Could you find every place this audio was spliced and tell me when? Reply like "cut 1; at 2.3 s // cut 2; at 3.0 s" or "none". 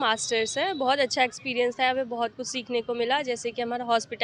none